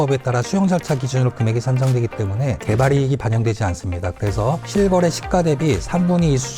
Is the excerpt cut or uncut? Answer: uncut